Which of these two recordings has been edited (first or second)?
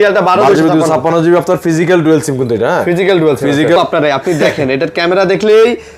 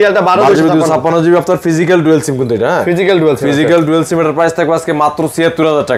first